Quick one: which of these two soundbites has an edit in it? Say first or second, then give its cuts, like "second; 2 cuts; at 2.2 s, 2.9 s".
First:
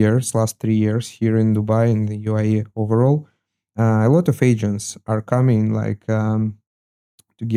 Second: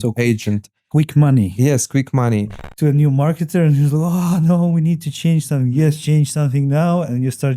second; 1 cut; at 2.6 s